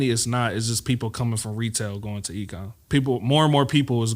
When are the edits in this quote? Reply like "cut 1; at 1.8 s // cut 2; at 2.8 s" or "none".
cut 1; at 2.7 s

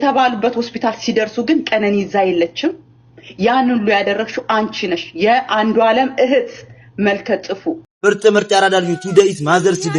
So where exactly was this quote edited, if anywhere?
cut 1; at 7.9 s

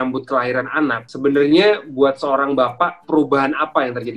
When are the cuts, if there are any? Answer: cut 1; at 1.1 s // cut 2; at 3.0 s

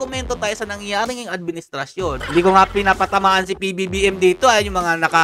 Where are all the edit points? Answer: cut 1; at 2.2 s

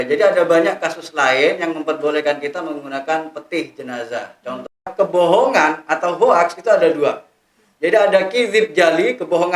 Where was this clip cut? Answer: cut 1; at 4.9 s

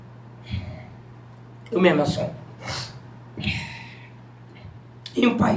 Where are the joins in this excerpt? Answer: none

